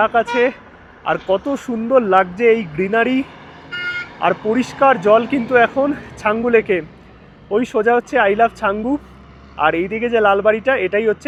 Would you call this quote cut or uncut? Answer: uncut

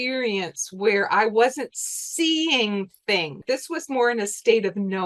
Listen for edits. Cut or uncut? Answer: cut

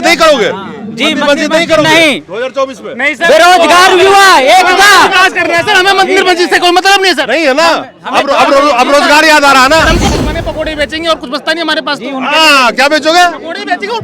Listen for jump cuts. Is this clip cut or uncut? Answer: cut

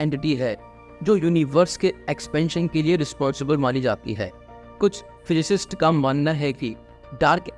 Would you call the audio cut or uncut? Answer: uncut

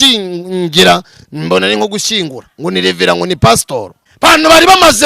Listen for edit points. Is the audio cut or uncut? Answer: cut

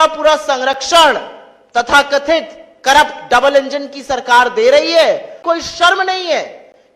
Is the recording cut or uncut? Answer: cut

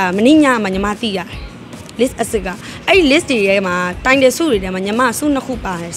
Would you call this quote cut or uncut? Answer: uncut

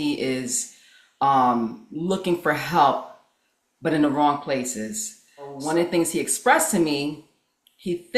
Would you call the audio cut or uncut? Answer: cut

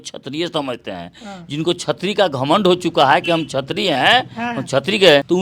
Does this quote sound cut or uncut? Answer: uncut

